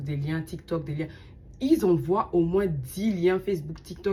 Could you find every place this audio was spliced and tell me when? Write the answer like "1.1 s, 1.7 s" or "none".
none

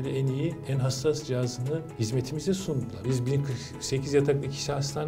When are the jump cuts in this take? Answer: 1.9 s, 3.0 s

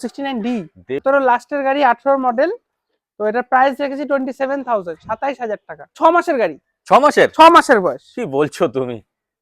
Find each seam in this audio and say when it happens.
1.0 s, 5.9 s

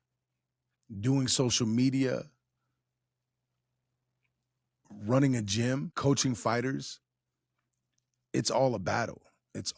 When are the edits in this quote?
5.9 s

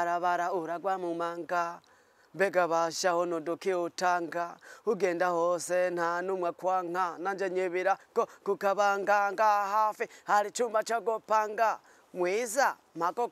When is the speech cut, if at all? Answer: none

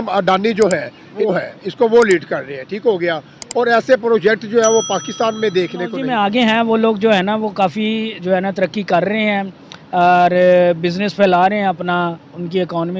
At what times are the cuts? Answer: 1.3 s, 6.0 s

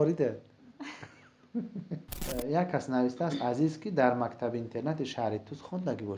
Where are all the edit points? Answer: 2.1 s

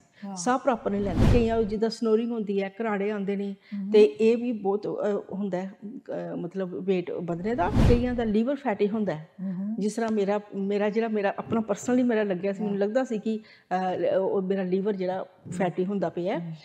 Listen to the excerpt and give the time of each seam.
1.3 s, 7.8 s

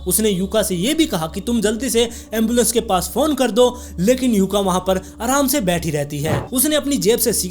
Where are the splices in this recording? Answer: 6.4 s

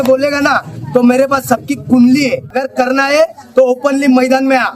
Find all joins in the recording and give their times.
2.5 s

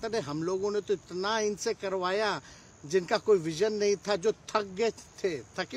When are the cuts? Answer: none

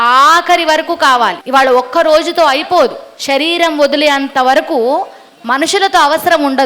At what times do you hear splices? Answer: 1.4 s

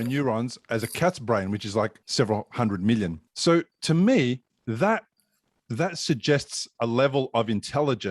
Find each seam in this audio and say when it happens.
2.0 s, 3.3 s

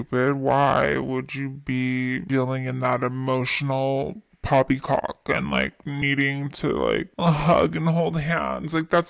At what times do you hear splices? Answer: none

